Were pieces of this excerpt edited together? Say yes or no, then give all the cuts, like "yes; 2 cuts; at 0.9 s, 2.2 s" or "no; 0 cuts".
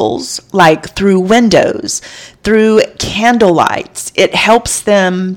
no; 0 cuts